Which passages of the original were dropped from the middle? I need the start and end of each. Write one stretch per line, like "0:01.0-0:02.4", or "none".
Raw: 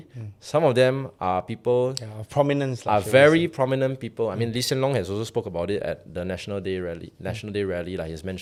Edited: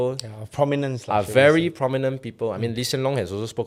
none